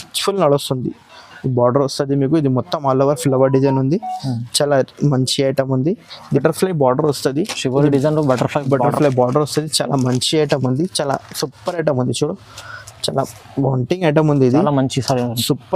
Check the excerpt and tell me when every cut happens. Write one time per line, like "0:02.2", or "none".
0:06.3